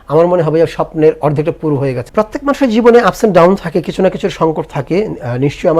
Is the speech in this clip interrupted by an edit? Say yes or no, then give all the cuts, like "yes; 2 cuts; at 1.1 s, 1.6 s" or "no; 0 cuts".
yes; 1 cut; at 2.0 s